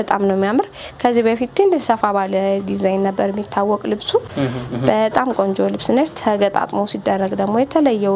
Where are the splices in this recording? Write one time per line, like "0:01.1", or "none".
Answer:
none